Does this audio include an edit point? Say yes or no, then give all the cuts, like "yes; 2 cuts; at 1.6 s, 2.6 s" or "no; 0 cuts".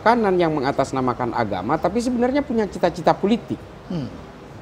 no; 0 cuts